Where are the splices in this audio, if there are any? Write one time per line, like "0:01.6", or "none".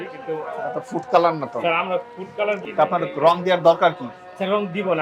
0:02.6